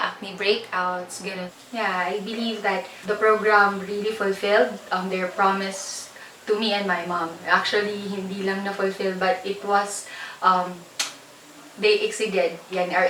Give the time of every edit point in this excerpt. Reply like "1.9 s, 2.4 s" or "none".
1.5 s